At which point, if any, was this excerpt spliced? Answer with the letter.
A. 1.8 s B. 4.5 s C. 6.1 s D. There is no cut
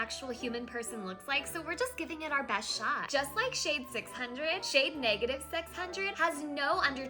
C